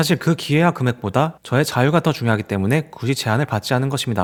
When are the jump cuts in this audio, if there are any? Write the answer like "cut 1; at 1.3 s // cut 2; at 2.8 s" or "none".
none